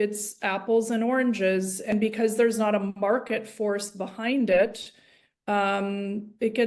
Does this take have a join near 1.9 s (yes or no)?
yes